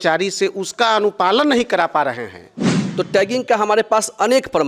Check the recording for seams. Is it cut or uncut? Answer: cut